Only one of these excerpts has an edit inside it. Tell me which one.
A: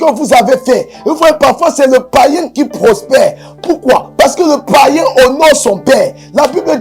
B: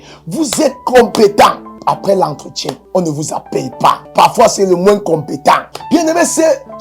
B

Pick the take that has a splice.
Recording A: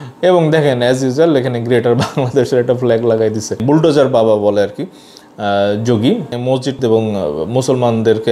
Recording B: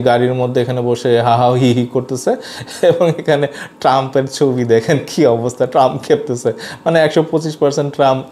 A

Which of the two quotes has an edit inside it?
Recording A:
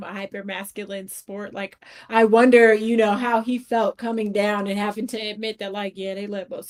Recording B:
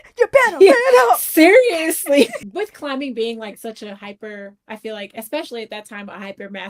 B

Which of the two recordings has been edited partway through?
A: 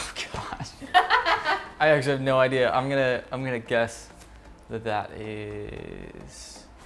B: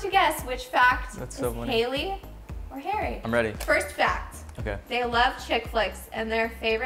B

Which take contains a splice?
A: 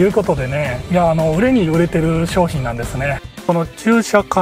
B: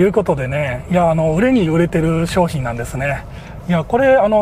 A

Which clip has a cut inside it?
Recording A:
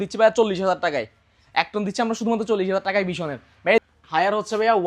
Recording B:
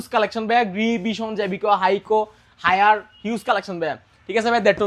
A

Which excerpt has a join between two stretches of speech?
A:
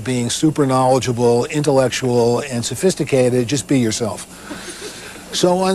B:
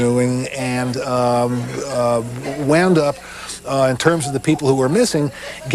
A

